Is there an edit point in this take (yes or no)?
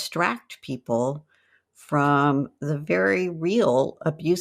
no